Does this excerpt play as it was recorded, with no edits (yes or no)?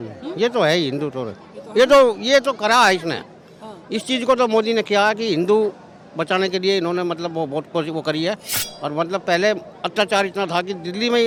yes